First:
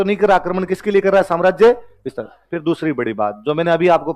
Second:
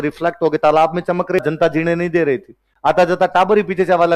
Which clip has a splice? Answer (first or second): second